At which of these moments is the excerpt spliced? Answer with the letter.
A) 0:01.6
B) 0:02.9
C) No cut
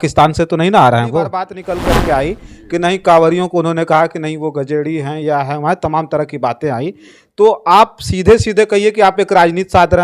A